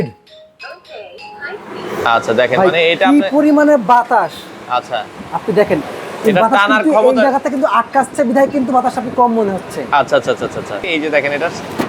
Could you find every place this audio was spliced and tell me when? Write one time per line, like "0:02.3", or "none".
0:10.9

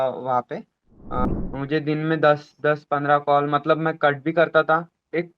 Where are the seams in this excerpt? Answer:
0:01.3

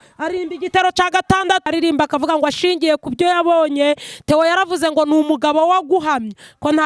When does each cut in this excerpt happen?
0:01.6

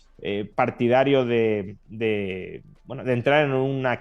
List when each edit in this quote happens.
none

